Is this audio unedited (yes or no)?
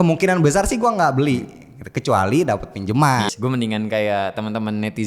no